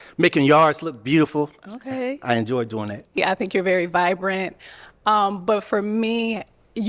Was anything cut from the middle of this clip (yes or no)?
yes